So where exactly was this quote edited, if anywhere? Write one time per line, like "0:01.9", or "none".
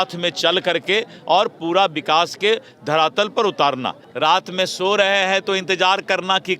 0:04.0